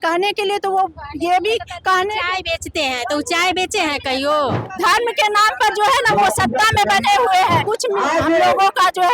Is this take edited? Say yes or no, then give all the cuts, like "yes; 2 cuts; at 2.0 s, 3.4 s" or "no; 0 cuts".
yes; 2 cuts; at 4.6 s, 7.6 s